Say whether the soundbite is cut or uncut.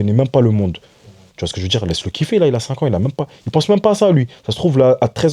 uncut